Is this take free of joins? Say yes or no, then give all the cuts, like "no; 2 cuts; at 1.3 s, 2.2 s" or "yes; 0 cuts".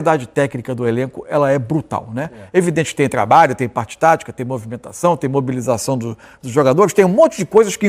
yes; 0 cuts